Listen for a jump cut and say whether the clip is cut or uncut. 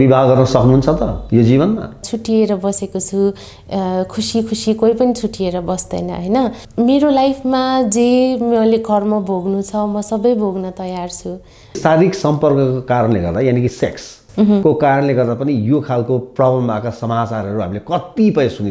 cut